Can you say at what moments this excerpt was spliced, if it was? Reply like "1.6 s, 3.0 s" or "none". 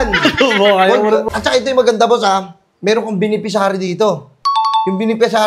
1.3 s